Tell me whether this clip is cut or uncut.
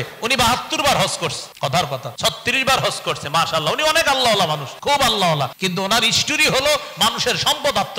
cut